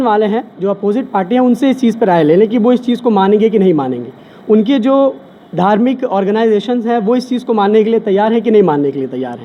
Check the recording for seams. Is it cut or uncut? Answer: uncut